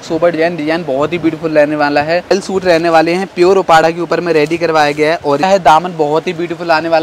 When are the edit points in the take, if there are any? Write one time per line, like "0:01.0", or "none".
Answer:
0:02.3
0:05.4